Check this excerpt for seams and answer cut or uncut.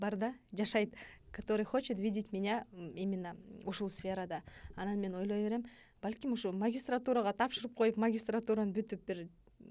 uncut